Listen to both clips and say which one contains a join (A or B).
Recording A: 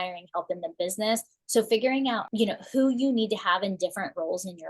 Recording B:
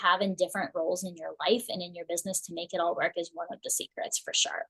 A